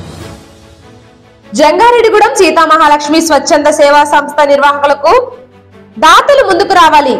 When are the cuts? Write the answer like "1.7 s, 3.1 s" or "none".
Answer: 1.0 s